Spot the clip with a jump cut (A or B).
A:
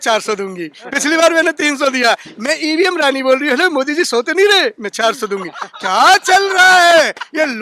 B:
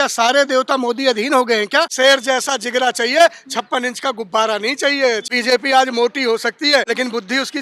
B